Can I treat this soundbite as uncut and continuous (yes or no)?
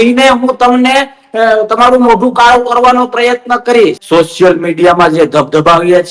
no